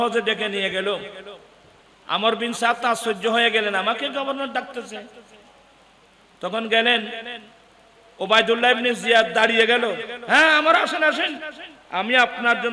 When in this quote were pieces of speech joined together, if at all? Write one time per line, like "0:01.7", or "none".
none